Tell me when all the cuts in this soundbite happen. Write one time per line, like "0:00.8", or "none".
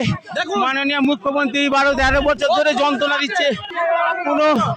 0:03.7